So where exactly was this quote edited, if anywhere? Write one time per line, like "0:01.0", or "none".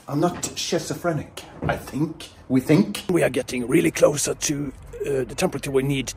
0:03.1

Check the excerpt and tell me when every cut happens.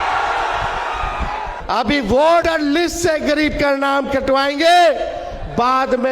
0:01.5
0:02.4

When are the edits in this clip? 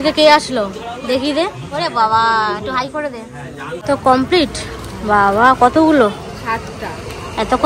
0:03.7

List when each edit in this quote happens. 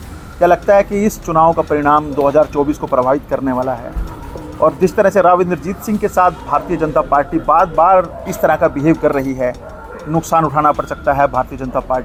none

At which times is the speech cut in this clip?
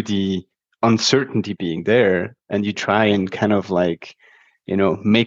none

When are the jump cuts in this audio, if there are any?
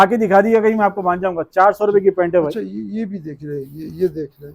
none

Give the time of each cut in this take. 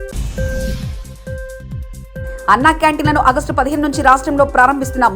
0:02.0

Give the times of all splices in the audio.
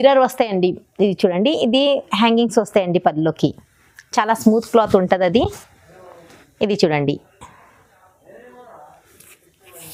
none

